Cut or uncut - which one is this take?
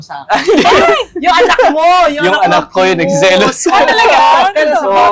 uncut